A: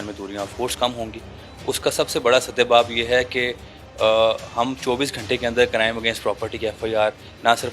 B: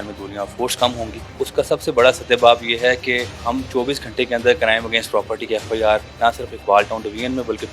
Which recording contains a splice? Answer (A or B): B